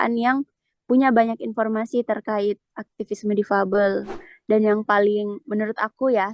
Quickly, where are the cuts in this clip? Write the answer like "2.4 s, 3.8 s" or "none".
4.1 s